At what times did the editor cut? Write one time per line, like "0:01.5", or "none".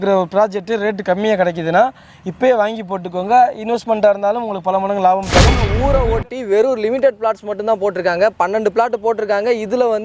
0:05.7

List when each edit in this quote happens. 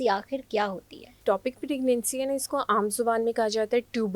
0:01.2

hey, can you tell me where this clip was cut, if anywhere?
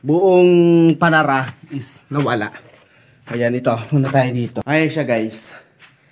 0:04.6

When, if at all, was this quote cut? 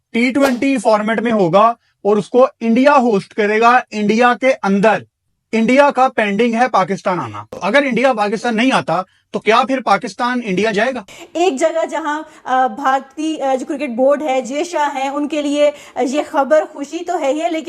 0:07.5
0:11.1

